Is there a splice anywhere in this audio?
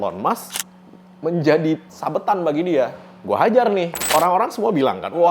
yes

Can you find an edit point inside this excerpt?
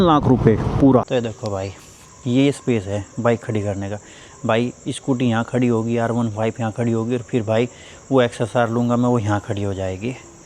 yes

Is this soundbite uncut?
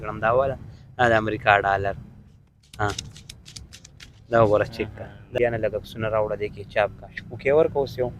no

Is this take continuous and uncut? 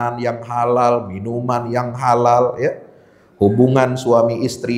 yes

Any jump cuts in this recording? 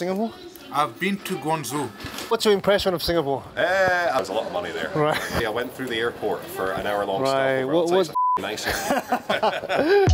yes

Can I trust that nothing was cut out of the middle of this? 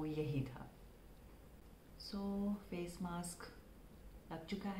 yes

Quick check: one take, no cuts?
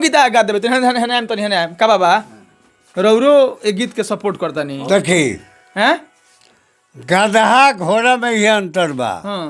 yes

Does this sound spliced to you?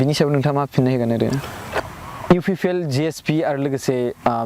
yes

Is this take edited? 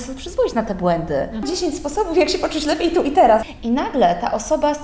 yes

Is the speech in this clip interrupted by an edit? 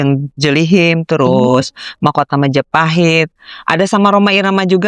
no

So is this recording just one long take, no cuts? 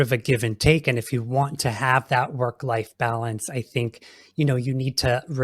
yes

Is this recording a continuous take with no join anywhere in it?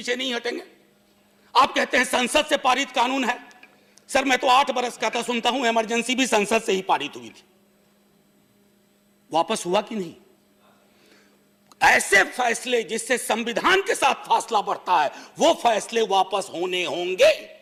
yes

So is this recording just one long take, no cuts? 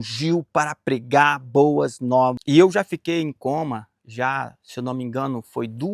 no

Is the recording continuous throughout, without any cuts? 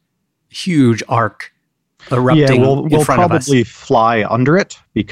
yes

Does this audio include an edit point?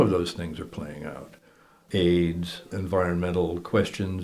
yes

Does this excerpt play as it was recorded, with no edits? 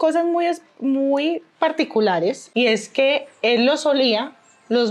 no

